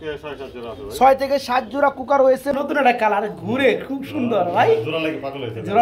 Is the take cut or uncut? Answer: cut